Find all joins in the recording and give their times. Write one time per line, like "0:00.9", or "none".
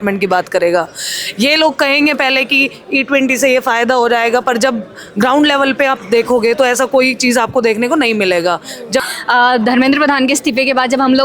0:09.1